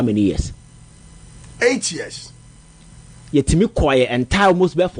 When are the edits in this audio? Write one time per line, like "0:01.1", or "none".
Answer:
0:03.4

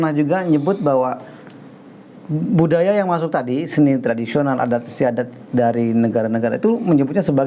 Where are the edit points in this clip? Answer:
none

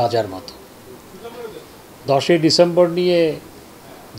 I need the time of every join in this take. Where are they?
none

